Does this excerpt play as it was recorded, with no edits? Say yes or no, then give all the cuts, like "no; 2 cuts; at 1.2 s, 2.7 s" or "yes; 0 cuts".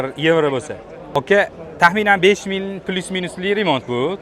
no; 1 cut; at 1.2 s